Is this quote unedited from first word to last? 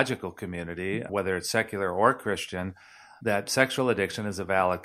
no; 2 cuts; at 1.1 s, 3.1 s

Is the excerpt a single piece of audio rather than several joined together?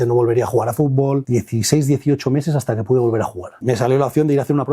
no; 2 cuts; at 1.2 s, 3.5 s

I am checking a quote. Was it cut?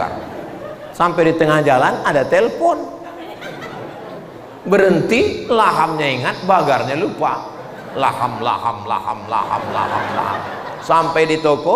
no; 0 cuts

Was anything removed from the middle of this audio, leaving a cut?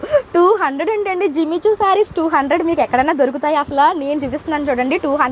no; 0 cuts

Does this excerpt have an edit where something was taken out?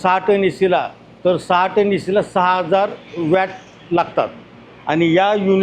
no; 0 cuts

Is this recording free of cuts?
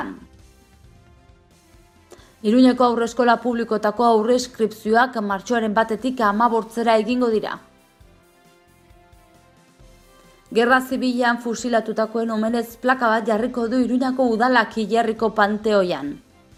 yes; 0 cuts

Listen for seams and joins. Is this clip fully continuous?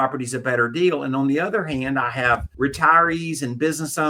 no; 1 cut; at 2.5 s

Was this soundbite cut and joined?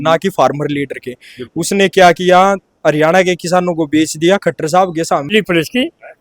yes; 1 cut; at 5.3 s

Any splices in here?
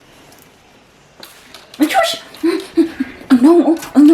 no; 0 cuts

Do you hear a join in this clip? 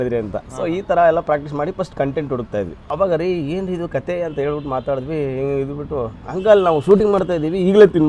yes; 1 cut; at 2.8 s

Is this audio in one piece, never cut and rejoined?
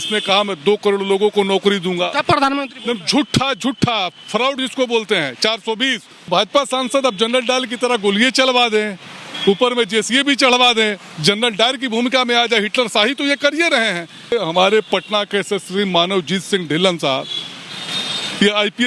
no; 2 cuts; at 6.3 s, 14.3 s

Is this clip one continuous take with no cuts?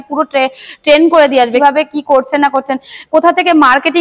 no; 1 cut; at 1.6 s

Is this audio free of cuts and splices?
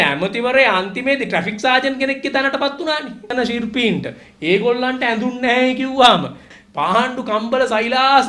no; 2 cuts; at 3.3 s, 6.5 s

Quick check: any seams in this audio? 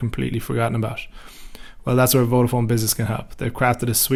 no; 0 cuts

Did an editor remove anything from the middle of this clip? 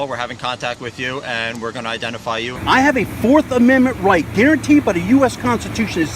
yes; 1 cut; at 2.5 s

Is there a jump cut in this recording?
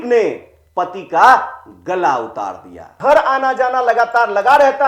yes; 1 cut; at 3.0 s

